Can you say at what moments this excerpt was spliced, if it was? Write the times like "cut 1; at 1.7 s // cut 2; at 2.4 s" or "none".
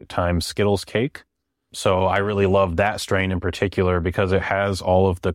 none